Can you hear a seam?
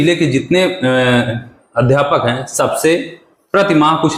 no; 0 cuts

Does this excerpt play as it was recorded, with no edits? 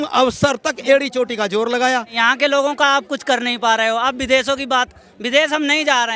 no; 1 cut; at 2.1 s

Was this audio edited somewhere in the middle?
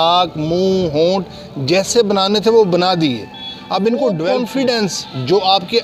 yes; 1 cut; at 4.3 s

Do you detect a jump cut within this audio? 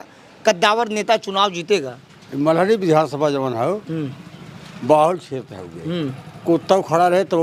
no; 0 cuts

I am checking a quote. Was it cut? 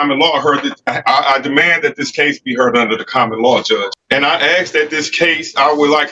yes; 1 cut; at 3.9 s

